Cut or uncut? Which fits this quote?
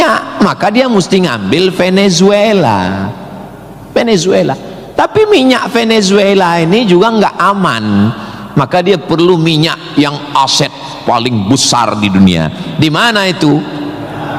uncut